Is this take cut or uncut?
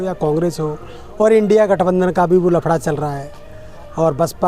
uncut